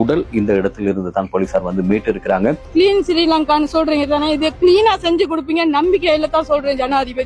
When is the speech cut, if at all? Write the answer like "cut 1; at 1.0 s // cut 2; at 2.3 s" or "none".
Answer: cut 1; at 2.6 s